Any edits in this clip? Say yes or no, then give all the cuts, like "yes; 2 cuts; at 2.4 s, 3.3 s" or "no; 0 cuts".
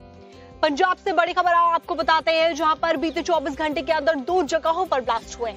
yes; 1 cut; at 2.8 s